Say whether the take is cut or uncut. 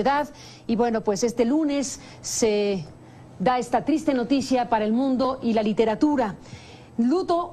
cut